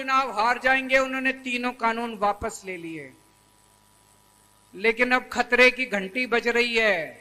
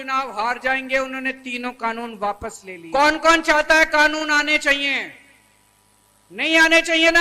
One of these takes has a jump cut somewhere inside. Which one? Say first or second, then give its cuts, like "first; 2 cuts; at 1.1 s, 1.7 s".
second; 1 cut; at 2.7 s